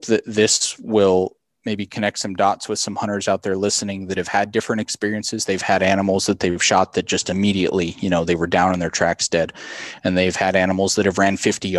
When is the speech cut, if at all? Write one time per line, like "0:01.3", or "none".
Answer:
0:01.5